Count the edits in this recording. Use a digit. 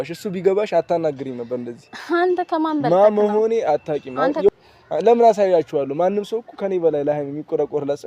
1